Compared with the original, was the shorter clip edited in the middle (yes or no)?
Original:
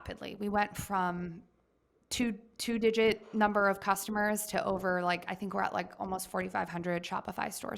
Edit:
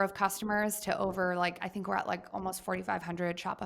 no